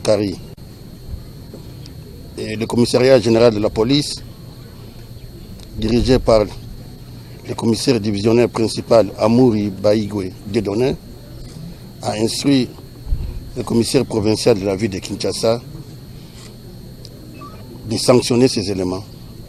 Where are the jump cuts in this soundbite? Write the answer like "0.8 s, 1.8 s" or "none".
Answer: none